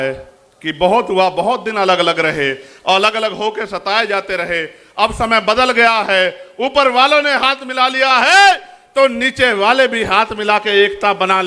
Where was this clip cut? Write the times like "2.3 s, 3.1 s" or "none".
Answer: none